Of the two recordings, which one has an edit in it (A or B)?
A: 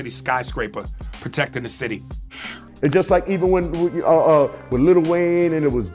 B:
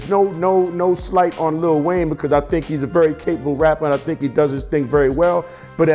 A